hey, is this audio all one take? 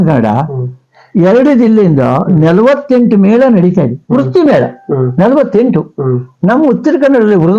yes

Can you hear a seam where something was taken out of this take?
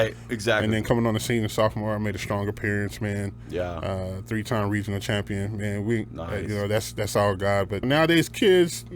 yes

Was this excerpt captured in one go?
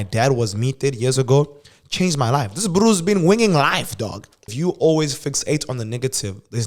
no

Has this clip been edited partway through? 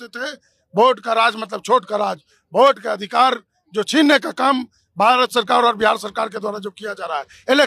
no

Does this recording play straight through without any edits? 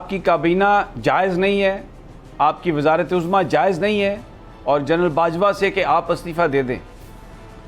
yes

